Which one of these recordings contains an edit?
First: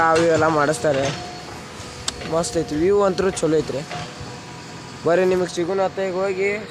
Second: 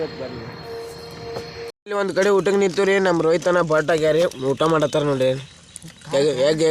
second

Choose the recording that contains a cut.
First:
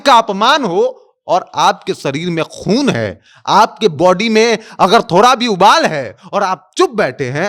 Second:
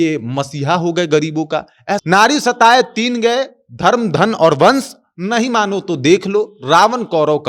second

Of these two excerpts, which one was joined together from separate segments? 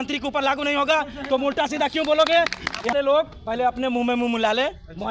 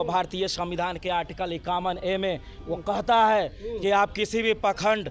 first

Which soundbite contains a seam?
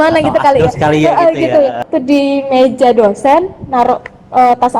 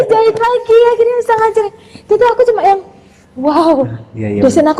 first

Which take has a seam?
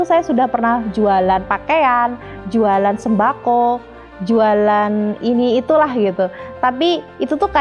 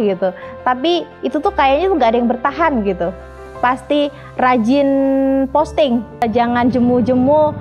second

